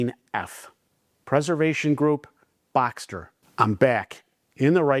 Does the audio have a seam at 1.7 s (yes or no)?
no